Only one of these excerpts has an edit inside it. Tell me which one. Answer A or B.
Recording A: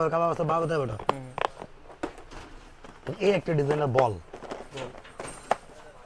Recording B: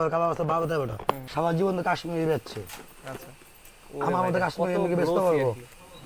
B